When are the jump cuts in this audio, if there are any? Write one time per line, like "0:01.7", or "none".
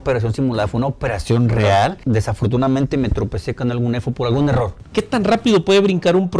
0:02.0
0:04.8